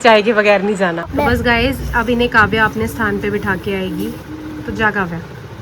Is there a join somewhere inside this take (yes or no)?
yes